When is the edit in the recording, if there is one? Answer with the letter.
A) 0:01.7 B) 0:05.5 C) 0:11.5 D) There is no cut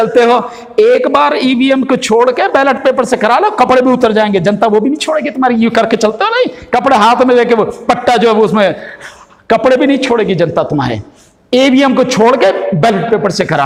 D